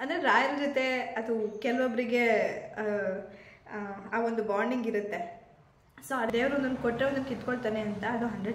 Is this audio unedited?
no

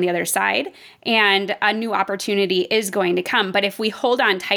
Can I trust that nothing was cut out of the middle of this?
yes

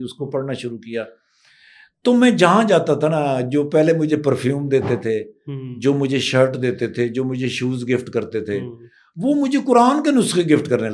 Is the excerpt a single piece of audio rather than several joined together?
yes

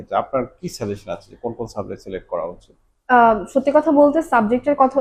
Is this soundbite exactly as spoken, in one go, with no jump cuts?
yes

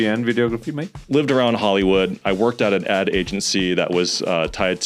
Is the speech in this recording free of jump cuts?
no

